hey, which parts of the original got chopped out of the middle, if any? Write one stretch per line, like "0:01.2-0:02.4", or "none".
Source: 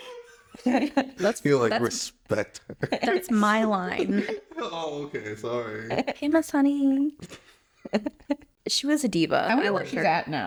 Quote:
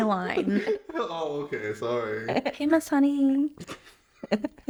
none